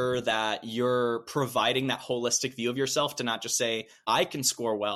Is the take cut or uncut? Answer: cut